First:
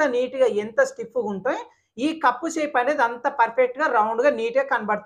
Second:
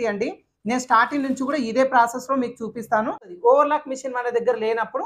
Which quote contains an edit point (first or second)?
second